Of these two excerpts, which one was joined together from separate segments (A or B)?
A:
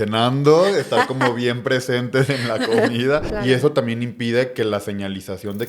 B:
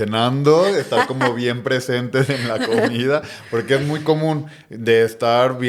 A